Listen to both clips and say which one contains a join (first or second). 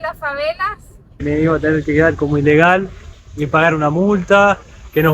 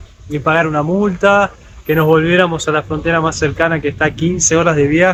first